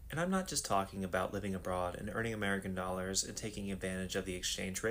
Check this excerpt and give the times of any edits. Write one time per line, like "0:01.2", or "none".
none